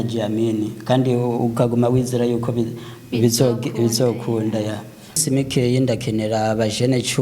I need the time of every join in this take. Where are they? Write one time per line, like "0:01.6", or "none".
0:05.2